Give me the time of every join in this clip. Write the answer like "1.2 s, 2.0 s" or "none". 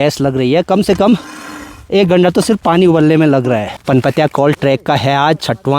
3.7 s